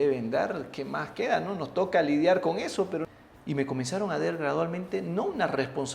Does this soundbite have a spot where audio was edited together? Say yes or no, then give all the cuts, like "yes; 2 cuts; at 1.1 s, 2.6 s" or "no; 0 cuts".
yes; 1 cut; at 3.0 s